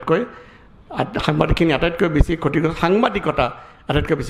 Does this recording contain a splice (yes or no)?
no